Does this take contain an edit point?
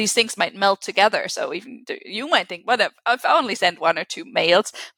no; 0 cuts

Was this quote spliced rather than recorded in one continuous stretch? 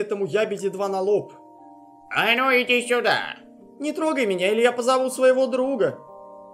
no; 0 cuts

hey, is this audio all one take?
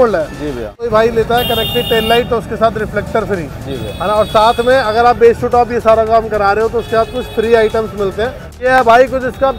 no; 2 cuts; at 0.9 s, 8.4 s

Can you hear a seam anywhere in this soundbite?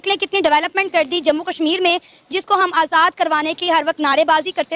no; 0 cuts

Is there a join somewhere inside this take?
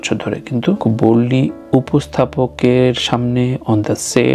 no; 0 cuts

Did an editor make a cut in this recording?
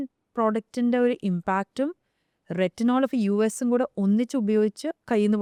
no; 0 cuts

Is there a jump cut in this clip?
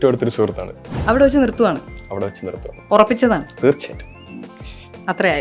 yes; 1 cut; at 2.7 s

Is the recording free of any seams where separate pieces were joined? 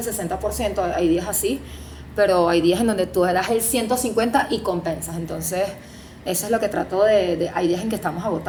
yes; 0 cuts

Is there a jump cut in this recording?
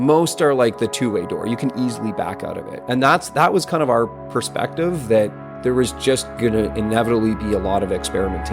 yes; 2 cuts; at 2.7 s, 5.5 s

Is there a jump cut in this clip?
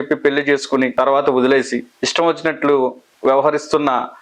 yes; 3 cuts; at 0.9 s, 2.0 s, 3.1 s

